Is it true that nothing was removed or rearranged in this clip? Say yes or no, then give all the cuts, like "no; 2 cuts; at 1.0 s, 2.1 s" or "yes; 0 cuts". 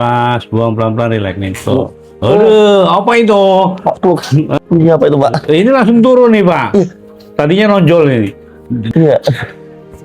no; 2 cuts; at 4.5 s, 8.9 s